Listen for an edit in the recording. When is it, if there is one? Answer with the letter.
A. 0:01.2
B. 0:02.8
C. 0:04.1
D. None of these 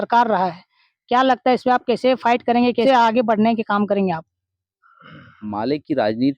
B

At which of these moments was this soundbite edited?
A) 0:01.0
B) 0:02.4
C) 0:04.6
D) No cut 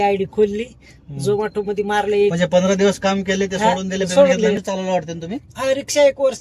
C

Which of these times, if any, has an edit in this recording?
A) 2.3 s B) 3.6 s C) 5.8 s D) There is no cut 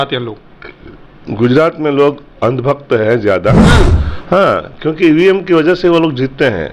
B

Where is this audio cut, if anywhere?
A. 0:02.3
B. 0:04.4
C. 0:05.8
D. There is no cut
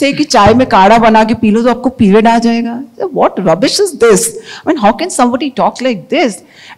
D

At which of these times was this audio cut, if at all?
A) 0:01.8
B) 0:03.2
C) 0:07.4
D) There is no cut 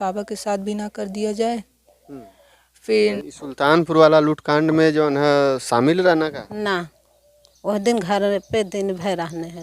B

